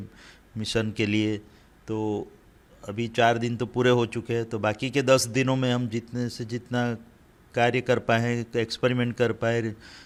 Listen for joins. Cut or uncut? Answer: uncut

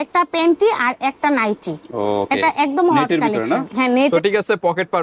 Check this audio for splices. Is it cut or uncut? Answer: cut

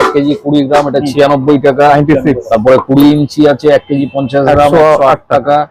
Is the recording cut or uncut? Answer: uncut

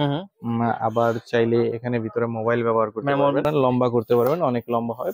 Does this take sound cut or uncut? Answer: cut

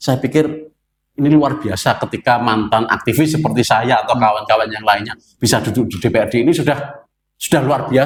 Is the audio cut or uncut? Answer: uncut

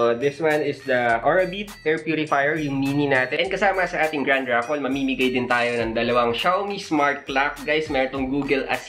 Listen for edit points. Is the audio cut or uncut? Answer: cut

